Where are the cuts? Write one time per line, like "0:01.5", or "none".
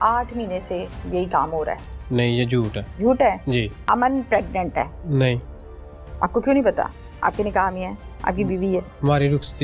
0:02.8
0:03.8
0:05.0